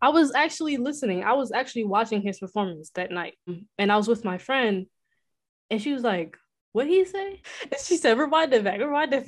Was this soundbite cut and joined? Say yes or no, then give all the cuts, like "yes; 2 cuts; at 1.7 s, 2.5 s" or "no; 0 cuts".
yes; 2 cuts; at 3.6 s, 7.4 s